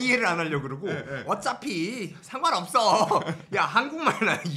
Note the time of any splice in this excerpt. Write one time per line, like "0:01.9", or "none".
none